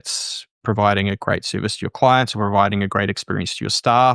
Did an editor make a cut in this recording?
no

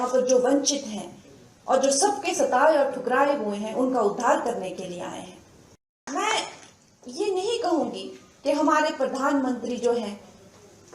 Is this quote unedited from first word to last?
no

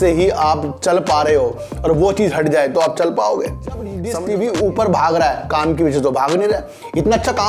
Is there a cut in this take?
yes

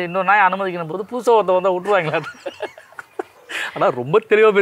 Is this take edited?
no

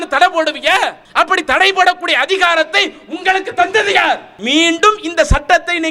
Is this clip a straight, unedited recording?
no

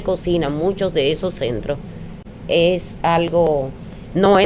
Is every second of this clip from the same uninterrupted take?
yes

